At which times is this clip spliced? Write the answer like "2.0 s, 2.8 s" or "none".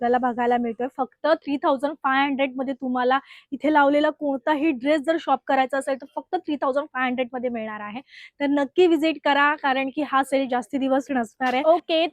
none